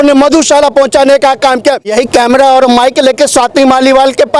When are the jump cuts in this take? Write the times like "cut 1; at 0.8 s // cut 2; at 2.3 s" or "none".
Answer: cut 1; at 1.9 s